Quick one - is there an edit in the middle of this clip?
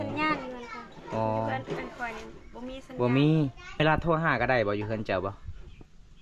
yes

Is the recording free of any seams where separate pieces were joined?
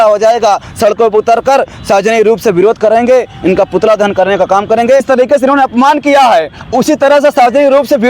no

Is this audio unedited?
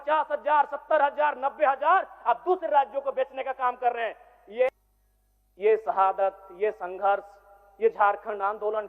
no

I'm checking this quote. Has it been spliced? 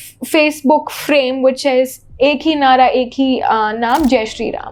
no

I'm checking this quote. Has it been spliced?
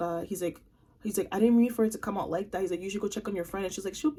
no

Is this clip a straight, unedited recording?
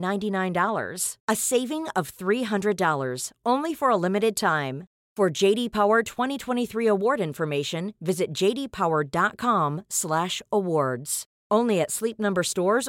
yes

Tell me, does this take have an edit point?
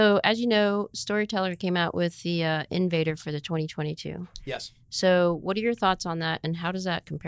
no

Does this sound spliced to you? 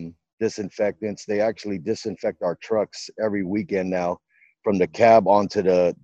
no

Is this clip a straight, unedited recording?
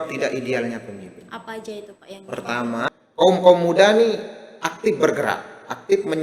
no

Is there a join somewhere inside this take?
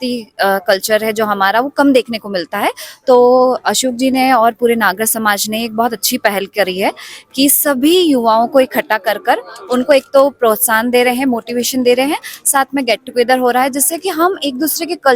no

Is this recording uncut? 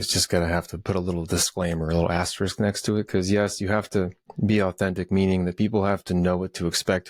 yes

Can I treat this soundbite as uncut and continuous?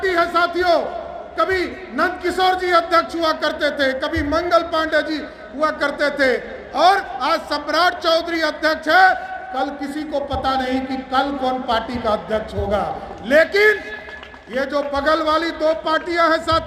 yes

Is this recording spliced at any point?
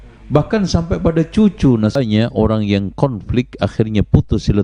yes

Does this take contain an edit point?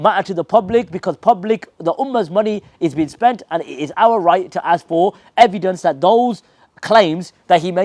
no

